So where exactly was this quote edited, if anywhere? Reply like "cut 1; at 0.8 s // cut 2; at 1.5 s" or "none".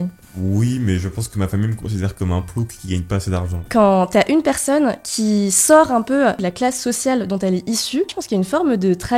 cut 1; at 3.6 s // cut 2; at 6.4 s // cut 3; at 8.2 s